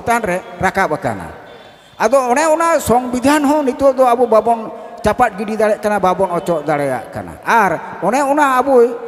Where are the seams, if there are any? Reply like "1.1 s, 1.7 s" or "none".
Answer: none